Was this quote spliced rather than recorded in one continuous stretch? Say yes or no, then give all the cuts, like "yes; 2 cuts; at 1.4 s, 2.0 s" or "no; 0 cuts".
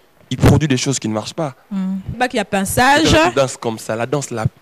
yes; 1 cut; at 2.2 s